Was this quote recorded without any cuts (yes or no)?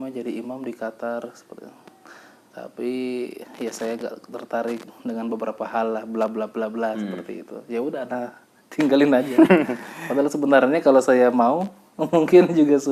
yes